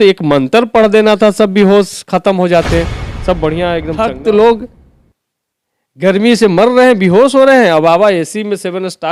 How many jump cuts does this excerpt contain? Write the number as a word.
one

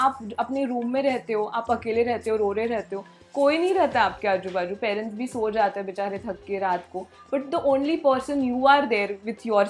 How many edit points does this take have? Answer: zero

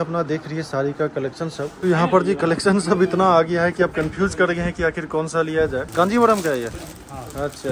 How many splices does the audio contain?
two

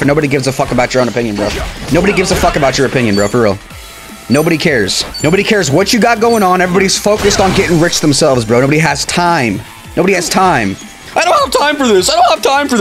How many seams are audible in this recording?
one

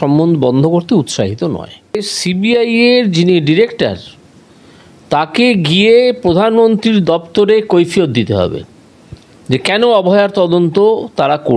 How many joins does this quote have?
one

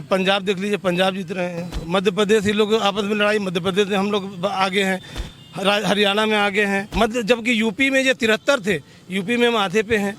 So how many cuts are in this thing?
one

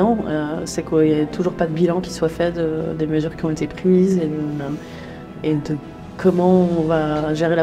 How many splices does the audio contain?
zero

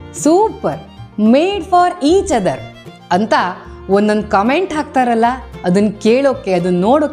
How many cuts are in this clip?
zero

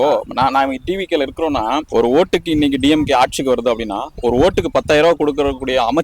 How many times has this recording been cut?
one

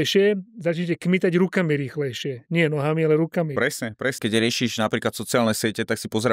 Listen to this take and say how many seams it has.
one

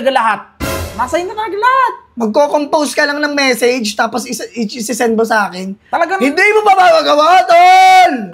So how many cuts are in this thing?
zero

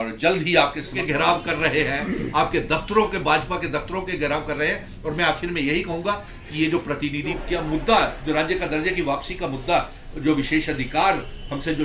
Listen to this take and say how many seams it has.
two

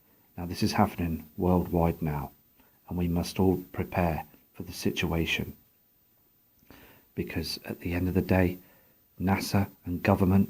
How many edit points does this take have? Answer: one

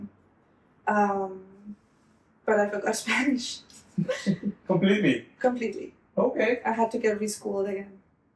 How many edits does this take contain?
zero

